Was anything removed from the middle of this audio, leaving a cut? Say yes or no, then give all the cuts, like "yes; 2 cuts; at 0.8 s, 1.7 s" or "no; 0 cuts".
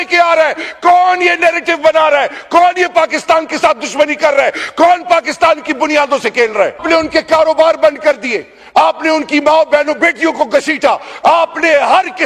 yes; 1 cut; at 6.8 s